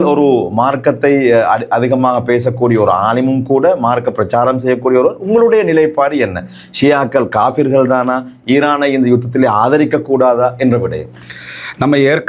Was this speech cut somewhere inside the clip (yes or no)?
no